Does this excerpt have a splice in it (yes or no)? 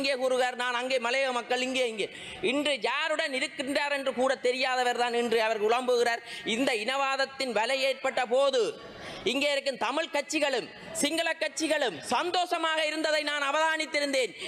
no